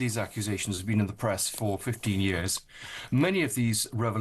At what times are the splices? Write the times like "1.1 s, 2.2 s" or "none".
none